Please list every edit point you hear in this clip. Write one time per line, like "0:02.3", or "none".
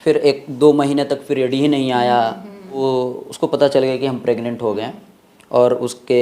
0:02.8